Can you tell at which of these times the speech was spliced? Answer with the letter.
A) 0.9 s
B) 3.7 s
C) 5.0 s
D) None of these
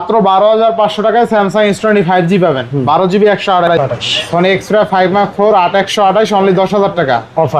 B